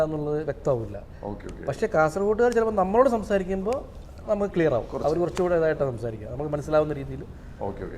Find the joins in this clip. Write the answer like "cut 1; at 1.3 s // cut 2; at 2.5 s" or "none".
none